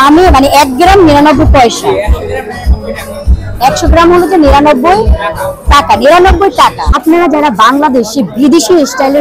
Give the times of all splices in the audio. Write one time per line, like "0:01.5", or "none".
0:06.9